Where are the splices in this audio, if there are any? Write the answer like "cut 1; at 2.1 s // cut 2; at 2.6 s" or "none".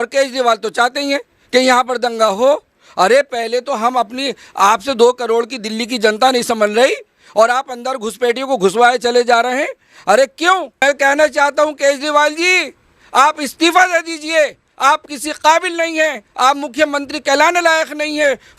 cut 1; at 10.8 s